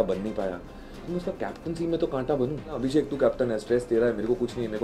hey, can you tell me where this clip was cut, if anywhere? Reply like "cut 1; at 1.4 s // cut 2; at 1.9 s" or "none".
cut 1; at 2.7 s